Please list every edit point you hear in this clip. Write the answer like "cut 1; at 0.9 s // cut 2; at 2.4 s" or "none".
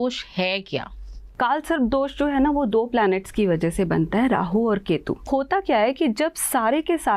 cut 1; at 1.2 s // cut 2; at 5.2 s